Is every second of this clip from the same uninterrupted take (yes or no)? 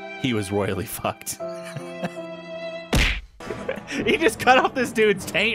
no